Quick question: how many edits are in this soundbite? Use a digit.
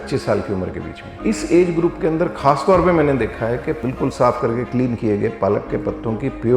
2